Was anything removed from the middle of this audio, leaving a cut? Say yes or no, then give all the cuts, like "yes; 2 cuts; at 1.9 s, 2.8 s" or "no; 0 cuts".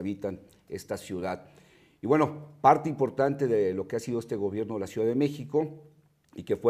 yes; 1 cut; at 4.3 s